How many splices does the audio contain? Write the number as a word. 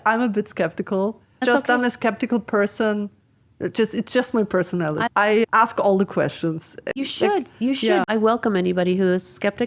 four